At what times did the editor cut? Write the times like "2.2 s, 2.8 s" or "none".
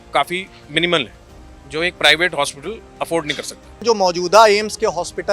3.8 s

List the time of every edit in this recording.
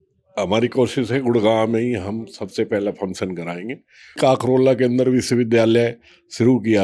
4.2 s

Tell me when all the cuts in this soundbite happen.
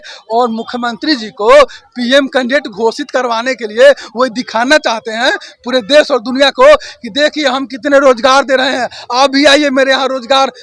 none

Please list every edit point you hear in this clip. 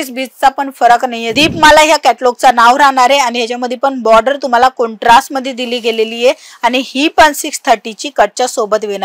1.2 s

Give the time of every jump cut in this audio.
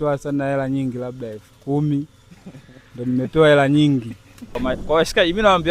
4.5 s

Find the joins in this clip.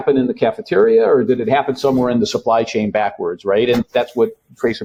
none

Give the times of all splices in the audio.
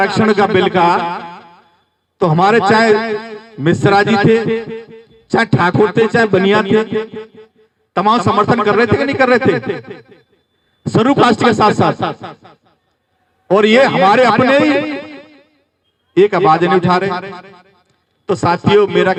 none

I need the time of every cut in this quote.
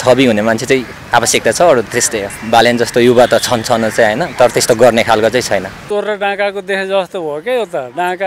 2.3 s, 5.8 s

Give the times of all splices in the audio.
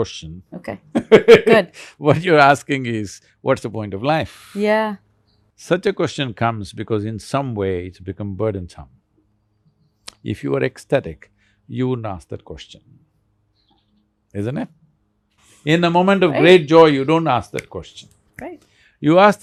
none

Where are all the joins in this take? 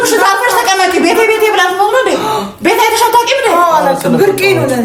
none

